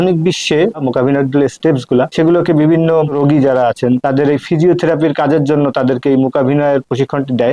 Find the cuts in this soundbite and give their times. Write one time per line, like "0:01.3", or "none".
0:00.8
0:02.1
0:03.1
0:04.0

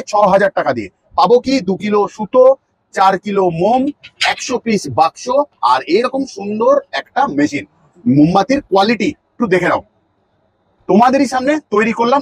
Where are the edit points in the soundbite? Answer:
none

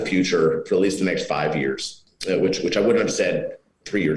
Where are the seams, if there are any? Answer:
none

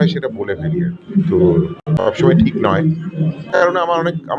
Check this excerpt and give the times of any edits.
0:01.8
0:03.4

